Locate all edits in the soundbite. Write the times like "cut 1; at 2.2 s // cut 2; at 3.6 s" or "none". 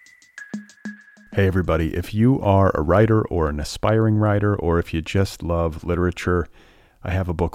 cut 1; at 0.9 s